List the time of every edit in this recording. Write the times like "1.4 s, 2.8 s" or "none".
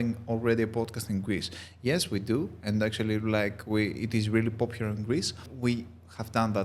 5.5 s